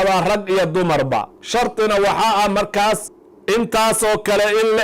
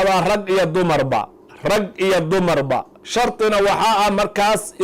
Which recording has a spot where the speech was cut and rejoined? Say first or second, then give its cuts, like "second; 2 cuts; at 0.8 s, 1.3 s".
first; 2 cuts; at 1.4 s, 3.1 s